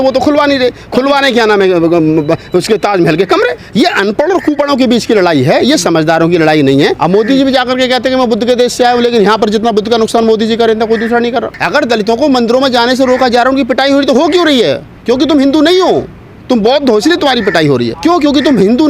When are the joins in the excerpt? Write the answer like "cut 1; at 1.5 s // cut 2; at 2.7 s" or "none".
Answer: cut 1; at 3.6 s // cut 2; at 7.0 s // cut 3; at 11.6 s // cut 4; at 17.9 s